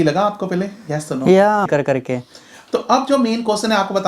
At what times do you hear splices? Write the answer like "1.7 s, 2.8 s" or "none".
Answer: 1.7 s